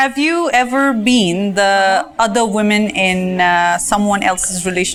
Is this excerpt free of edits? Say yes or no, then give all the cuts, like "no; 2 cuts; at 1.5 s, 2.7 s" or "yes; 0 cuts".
yes; 0 cuts